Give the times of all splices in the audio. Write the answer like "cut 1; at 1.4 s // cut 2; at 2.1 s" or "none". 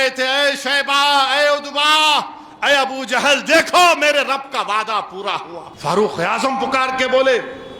cut 1; at 5.6 s